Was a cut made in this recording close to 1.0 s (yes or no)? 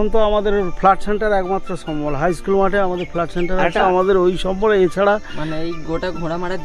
no